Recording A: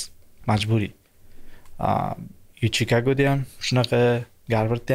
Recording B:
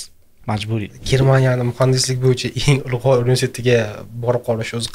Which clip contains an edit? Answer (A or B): B